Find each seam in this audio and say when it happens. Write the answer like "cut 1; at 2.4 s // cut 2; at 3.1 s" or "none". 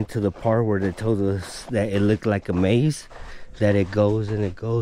none